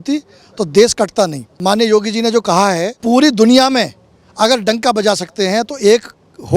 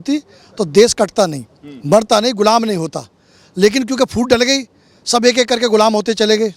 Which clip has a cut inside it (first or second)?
first